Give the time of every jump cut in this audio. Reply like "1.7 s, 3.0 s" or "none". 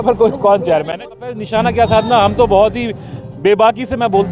1.2 s